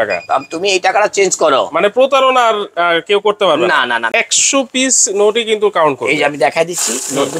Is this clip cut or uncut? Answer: cut